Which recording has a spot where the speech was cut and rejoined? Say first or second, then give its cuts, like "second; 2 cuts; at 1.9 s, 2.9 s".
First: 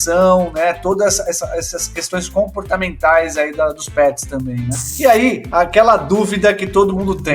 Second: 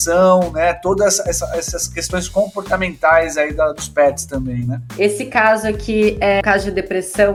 first; 1 cut; at 4.9 s